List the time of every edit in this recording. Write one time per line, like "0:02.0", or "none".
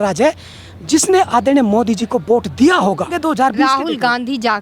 0:03.2